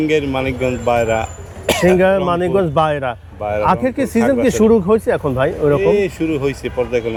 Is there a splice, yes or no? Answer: no